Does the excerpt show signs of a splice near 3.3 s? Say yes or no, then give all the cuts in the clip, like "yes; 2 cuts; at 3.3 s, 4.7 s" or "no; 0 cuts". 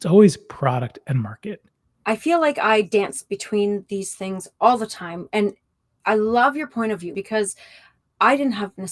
no; 2 cuts; at 1.9 s, 7.1 s